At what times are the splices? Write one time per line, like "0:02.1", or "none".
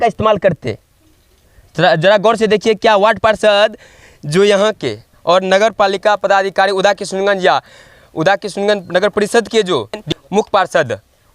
0:10.1